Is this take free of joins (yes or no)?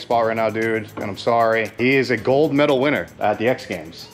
no